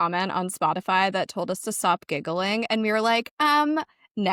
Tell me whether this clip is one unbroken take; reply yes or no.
yes